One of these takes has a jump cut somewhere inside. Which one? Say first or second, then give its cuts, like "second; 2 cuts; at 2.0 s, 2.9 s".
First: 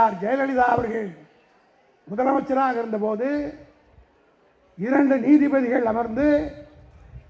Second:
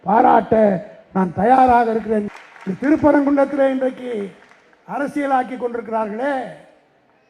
second; 1 cut; at 2.2 s